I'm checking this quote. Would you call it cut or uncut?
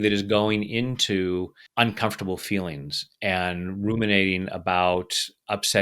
cut